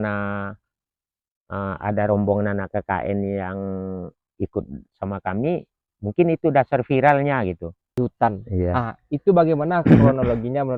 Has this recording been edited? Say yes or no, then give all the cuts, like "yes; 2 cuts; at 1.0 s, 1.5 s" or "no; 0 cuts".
yes; 1 cut; at 8.0 s